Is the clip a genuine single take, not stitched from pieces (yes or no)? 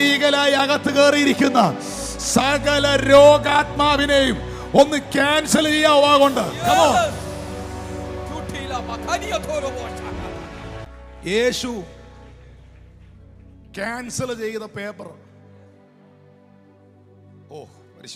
yes